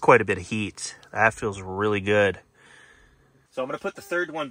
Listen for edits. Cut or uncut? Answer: uncut